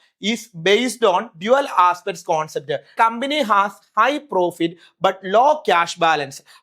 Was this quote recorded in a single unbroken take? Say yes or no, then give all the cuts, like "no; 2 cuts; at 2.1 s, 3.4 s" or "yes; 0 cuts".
no; 1 cut; at 2.9 s